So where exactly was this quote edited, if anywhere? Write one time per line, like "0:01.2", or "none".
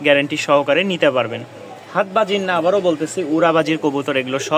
none